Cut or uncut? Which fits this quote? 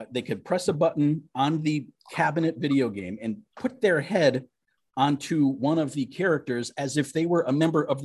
uncut